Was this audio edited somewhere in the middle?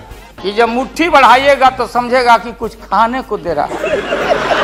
no; 0 cuts

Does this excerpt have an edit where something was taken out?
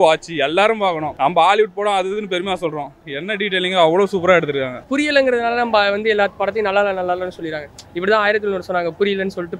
yes; 2 cuts; at 1.1 s, 4.8 s

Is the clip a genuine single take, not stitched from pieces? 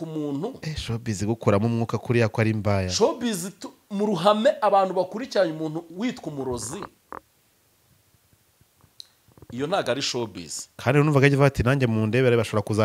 yes; 0 cuts

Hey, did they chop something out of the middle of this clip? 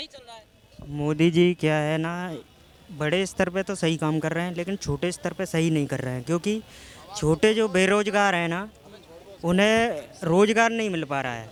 no; 0 cuts

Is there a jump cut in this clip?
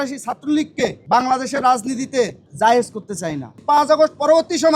yes; 3 cuts; at 1.0 s, 2.4 s, 3.5 s

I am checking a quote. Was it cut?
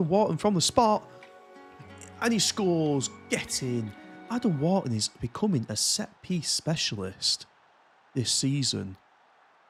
no; 0 cuts

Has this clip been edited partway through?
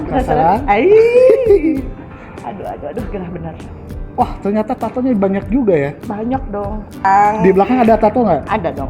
yes; 1 cut; at 7.0 s

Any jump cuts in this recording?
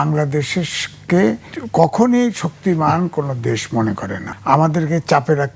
yes; 2 cuts; at 1.5 s, 4.3 s

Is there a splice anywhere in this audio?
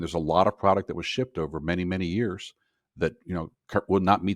no; 0 cuts

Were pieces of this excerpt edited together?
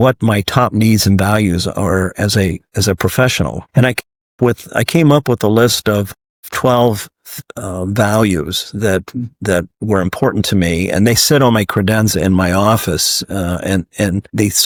no; 0 cuts

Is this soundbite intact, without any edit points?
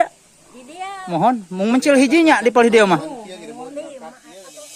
yes; 0 cuts

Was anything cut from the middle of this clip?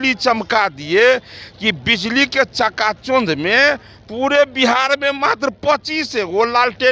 no; 0 cuts

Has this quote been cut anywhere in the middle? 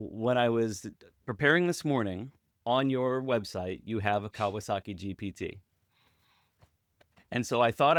no; 0 cuts

